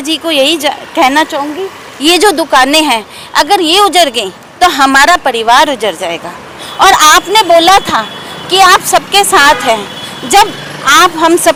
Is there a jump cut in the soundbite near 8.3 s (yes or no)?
no